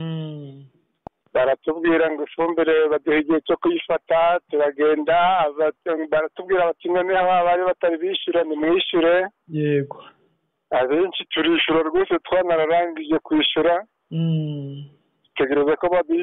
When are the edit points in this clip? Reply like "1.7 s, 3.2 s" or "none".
none